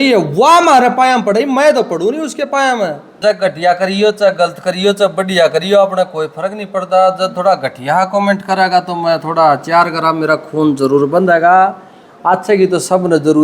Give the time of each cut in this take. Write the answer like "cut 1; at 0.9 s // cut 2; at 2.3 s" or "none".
cut 1; at 3.1 s